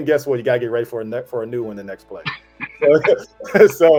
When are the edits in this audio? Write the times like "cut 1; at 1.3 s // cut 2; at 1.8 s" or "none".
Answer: none